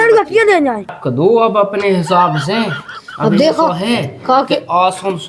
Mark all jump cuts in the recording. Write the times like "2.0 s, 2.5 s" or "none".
0.9 s